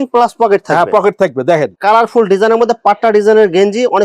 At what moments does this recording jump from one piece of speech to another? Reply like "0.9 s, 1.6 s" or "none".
1.7 s